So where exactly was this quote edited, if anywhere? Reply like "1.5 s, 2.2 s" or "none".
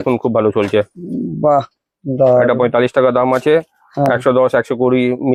none